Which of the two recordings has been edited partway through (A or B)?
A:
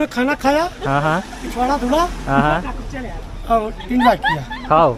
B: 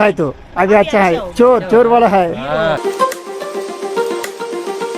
B